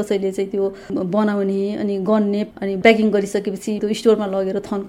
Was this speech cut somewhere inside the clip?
yes; 2 cuts; at 2.5 s, 3.8 s

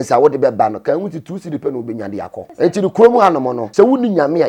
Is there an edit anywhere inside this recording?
yes; 2 cuts; at 2.4 s, 3.6 s

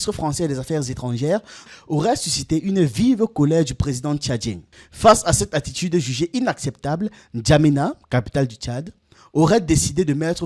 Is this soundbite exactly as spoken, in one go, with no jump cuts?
no; 2 cuts; at 1.6 s, 4.6 s

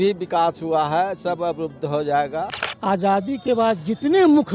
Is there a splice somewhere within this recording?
yes; 1 cut; at 2.6 s

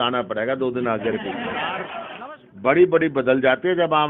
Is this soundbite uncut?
no; 1 cut; at 2.0 s

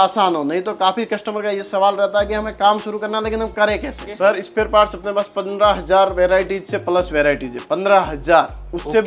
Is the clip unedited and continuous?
no; 1 cut; at 4.1 s

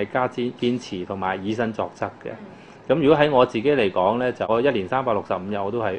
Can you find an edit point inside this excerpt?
yes; 1 cut; at 4.5 s

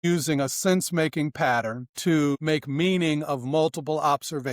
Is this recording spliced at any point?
yes; 1 cut; at 2.2 s

